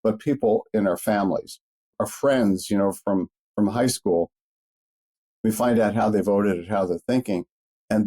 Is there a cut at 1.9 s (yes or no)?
yes